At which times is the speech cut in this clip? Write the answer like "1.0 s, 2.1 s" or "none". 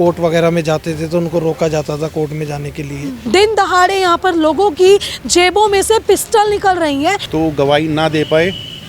3.1 s, 7.2 s